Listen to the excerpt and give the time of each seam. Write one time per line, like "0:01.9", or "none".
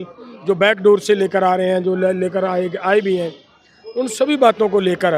none